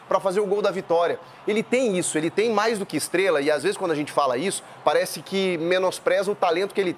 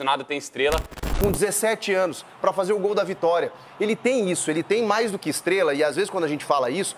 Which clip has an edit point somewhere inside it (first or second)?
second